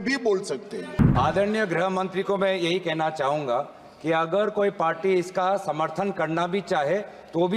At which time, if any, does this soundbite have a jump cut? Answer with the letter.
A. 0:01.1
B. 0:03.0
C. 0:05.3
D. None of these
A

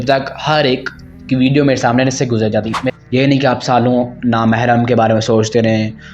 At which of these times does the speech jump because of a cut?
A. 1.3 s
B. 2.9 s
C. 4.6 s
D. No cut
B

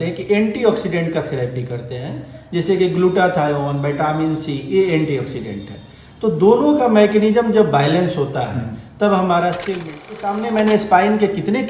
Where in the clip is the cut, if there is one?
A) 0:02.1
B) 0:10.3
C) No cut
B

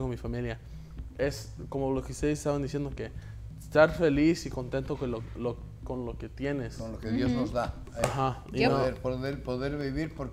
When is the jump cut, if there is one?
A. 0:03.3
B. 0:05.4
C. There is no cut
C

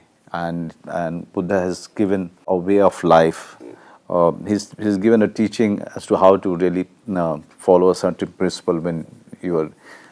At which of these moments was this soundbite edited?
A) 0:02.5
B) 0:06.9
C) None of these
A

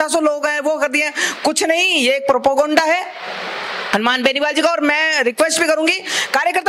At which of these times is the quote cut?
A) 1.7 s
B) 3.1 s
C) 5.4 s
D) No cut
D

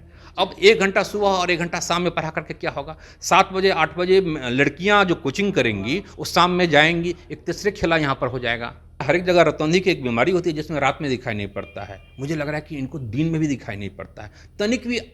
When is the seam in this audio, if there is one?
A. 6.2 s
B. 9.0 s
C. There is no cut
B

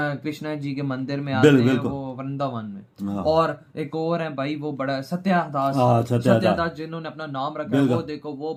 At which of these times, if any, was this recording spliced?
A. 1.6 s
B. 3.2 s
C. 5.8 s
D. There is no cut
D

